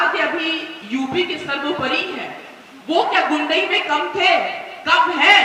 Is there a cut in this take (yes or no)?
no